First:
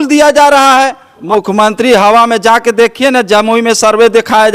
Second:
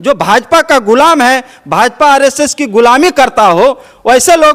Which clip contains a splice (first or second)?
first